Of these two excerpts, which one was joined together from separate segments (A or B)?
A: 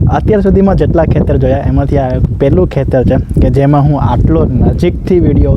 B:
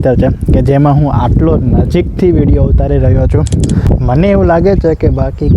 B